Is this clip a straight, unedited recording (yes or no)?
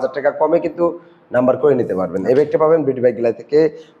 yes